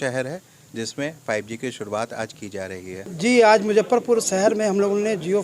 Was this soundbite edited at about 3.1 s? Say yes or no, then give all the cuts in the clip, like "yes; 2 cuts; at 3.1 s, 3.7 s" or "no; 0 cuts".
yes; 1 cut; at 3.1 s